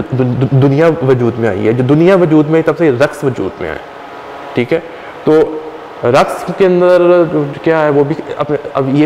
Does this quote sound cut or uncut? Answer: uncut